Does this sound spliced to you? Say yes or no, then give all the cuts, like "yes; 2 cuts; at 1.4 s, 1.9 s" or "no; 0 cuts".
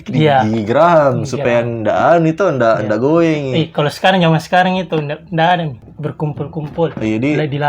yes; 1 cut; at 5.9 s